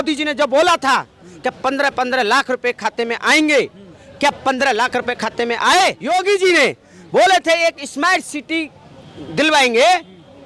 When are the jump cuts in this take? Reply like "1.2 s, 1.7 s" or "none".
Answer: 6.0 s